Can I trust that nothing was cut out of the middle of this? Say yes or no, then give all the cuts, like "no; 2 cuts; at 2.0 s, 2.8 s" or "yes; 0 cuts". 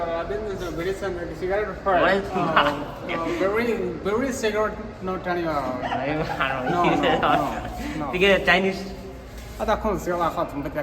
no; 2 cuts; at 2.3 s, 6.1 s